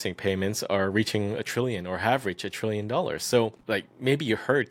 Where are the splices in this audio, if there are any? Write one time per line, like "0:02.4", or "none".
0:03.6